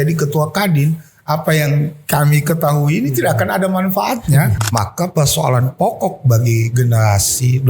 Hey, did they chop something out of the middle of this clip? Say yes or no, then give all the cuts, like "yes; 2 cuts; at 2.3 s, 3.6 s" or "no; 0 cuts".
yes; 1 cut; at 4.5 s